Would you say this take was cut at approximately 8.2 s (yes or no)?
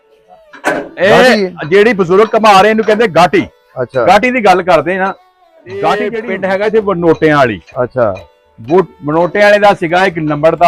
no